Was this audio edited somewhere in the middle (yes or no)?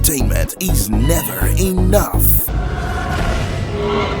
yes